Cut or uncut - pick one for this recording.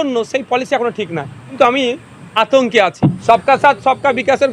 cut